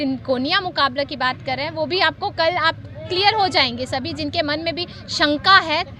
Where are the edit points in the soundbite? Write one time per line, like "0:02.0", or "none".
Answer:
none